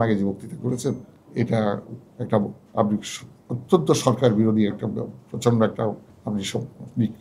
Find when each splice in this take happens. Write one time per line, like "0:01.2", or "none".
0:01.2
0:02.6
0:06.1